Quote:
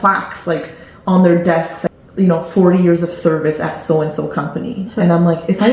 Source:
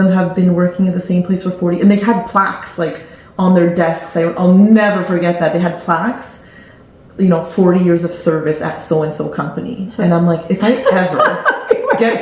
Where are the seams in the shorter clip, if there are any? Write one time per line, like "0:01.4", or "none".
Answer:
0:01.8